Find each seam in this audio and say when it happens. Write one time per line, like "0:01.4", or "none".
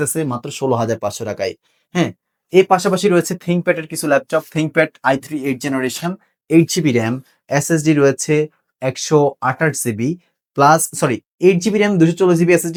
none